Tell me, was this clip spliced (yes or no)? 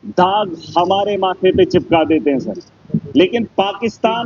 no